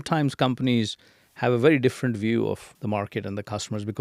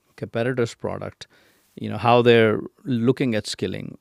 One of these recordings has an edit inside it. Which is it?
first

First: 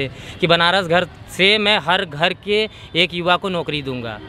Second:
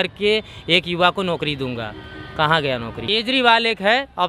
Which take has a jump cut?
second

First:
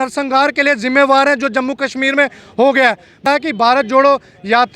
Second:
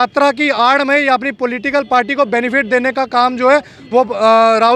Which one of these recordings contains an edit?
first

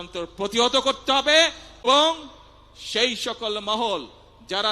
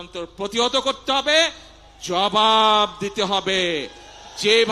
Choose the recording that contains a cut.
first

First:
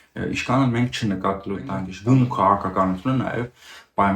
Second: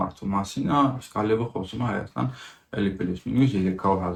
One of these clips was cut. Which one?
first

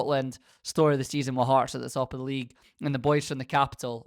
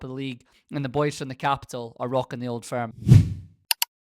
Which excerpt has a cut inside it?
second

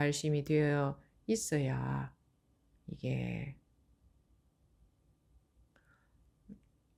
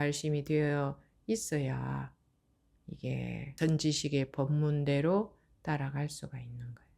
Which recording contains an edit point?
second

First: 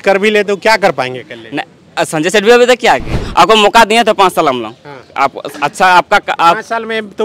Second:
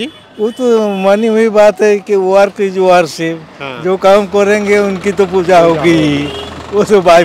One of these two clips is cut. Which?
first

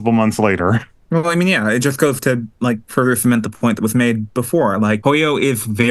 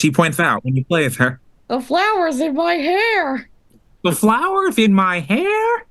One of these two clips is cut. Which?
first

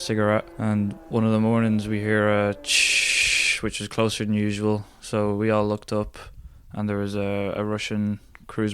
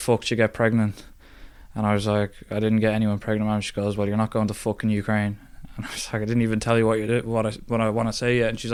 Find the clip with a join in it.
first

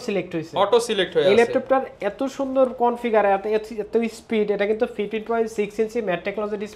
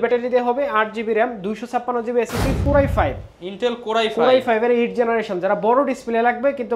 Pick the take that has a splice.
second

